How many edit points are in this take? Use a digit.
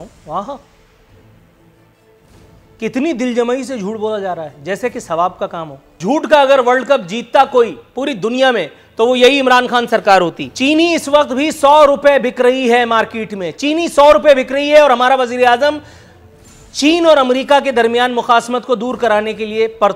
2